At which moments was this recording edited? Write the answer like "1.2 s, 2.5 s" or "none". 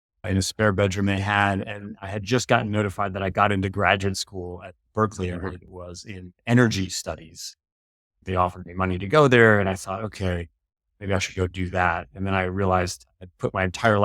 8.2 s